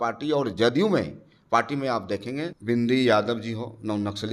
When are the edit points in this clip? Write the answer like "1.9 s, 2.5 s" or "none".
2.5 s